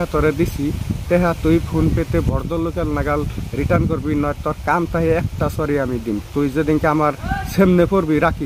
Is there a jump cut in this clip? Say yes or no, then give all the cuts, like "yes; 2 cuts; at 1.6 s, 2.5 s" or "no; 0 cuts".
no; 0 cuts